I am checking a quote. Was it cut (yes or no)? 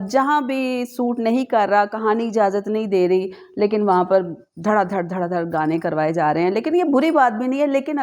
no